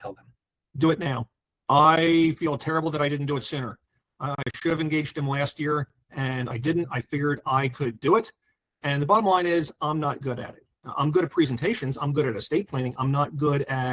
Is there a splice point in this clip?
no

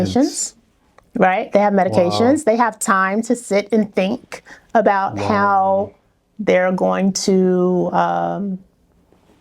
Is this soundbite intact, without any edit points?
yes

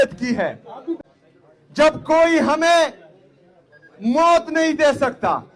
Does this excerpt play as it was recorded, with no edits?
no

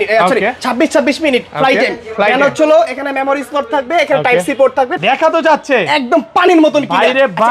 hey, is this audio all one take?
no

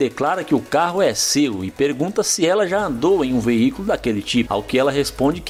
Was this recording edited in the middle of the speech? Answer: no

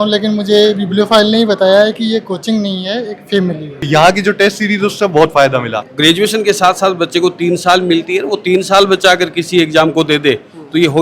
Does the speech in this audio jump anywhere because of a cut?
yes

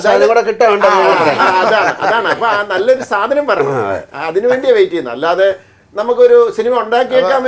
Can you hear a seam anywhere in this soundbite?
no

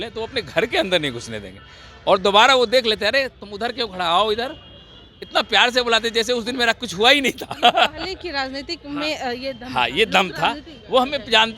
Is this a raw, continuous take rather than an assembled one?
yes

